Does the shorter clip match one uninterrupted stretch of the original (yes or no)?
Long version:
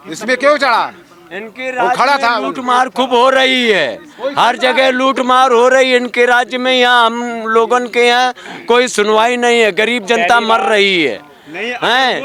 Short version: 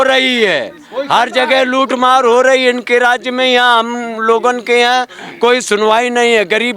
yes